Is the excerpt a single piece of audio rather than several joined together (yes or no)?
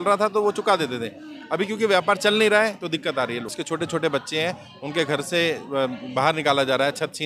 no